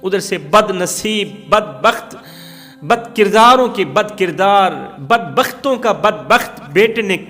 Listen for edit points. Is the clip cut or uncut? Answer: uncut